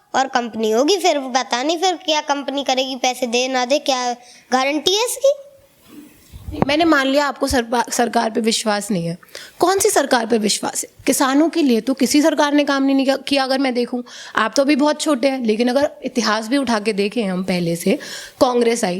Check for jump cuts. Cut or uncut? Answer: uncut